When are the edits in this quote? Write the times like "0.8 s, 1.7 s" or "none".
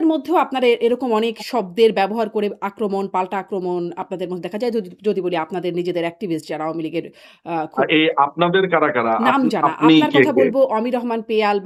none